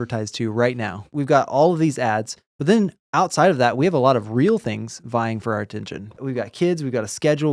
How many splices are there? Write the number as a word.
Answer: two